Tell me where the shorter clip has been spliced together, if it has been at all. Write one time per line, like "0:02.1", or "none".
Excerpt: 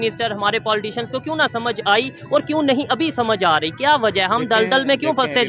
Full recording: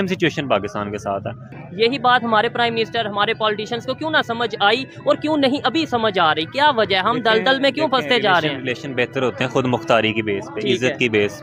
none